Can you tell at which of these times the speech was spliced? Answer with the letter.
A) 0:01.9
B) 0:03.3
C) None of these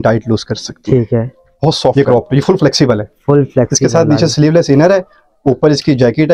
A